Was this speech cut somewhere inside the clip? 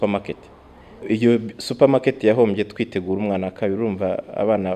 yes; 1 cut; at 1.0 s

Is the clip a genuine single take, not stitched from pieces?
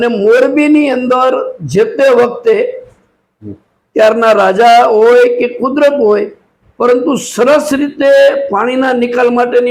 yes; 0 cuts

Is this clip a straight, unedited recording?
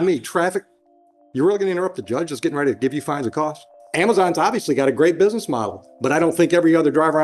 no; 1 cut; at 3.8 s

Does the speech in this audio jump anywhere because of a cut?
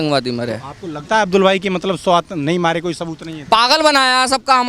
no; 0 cuts

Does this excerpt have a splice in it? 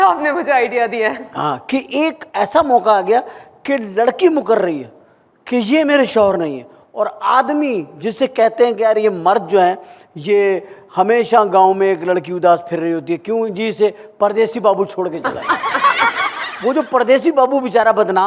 no; 0 cuts

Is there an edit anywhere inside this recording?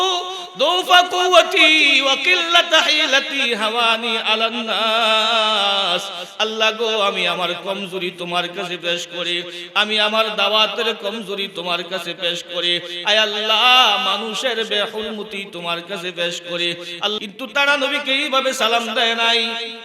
yes; 1 cut; at 17.2 s

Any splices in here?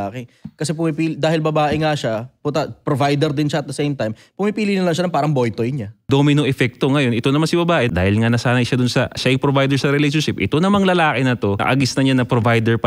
yes; 3 cuts; at 6.1 s, 7.9 s, 11.6 s

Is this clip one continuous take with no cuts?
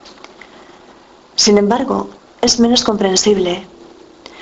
yes; 0 cuts

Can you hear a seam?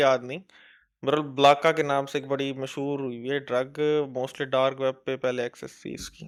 no; 0 cuts

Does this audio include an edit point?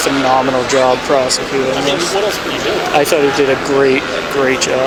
no; 0 cuts

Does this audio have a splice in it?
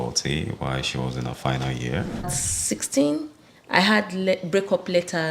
yes; 1 cut; at 2.5 s

